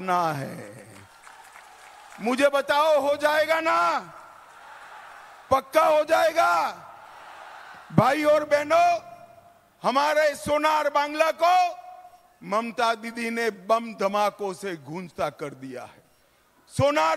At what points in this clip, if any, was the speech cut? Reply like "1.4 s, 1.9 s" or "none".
none